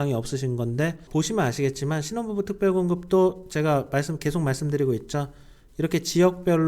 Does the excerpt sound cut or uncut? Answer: cut